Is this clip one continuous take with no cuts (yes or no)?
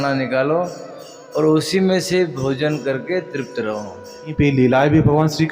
no